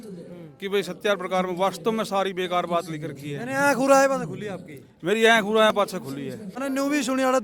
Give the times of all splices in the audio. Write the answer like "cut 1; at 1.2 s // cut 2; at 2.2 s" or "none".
cut 1; at 6.5 s

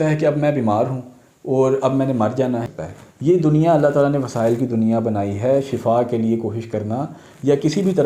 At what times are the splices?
cut 1; at 2.8 s

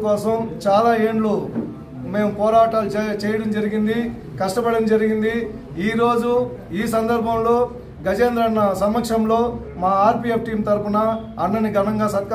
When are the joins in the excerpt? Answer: none

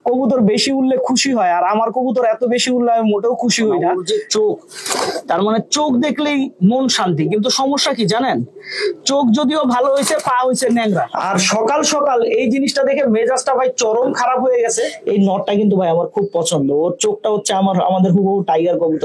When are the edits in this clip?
cut 1; at 3.9 s // cut 2; at 11.1 s // cut 3; at 15.0 s

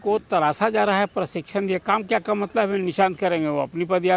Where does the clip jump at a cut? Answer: none

